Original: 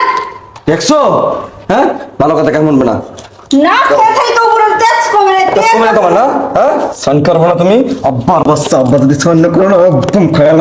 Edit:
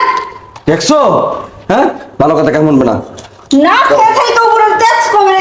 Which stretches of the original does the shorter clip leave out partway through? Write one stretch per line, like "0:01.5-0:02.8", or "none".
none